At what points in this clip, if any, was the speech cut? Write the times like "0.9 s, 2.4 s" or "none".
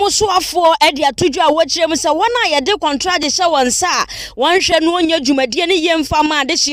none